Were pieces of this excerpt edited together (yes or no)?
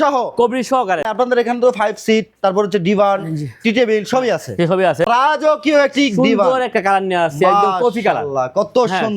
yes